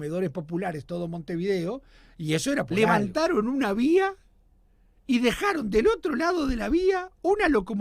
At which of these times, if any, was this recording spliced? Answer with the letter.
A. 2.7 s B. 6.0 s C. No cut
A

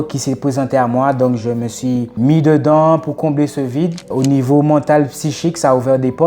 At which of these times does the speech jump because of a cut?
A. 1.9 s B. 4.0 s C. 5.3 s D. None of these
B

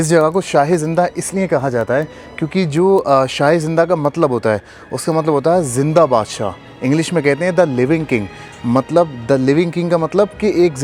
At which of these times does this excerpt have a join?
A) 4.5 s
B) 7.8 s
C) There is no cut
C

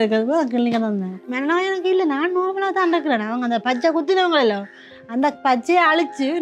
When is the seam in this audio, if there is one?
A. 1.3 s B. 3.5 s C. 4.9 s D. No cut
A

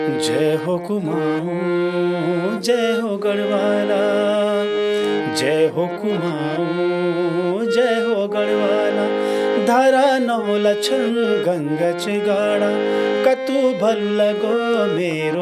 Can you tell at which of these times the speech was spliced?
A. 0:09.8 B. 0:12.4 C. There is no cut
C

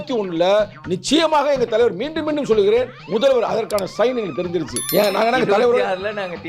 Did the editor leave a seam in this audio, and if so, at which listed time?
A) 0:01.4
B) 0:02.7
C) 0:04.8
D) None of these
C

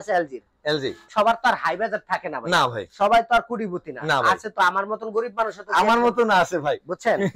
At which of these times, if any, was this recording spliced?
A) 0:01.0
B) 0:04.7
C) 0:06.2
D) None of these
A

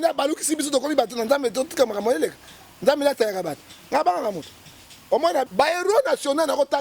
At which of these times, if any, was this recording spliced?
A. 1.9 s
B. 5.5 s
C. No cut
B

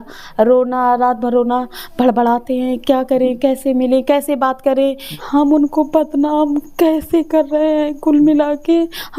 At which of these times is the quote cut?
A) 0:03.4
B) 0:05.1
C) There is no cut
B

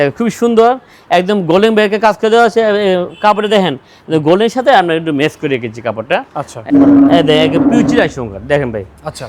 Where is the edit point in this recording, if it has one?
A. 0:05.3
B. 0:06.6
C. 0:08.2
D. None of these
B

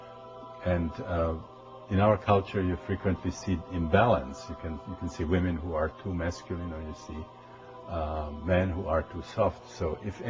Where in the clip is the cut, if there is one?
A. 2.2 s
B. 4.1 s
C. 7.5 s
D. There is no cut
A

